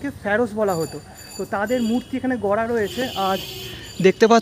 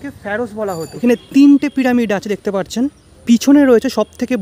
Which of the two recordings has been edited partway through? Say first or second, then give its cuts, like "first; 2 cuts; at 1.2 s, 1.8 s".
second; 2 cuts; at 0.9 s, 3.1 s